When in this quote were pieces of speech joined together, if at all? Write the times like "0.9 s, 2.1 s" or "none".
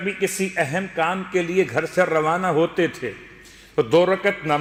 none